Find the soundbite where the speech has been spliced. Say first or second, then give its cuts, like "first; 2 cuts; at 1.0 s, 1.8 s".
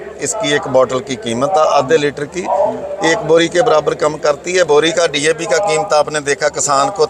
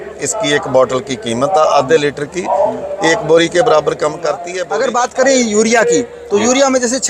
second; 1 cut; at 4.5 s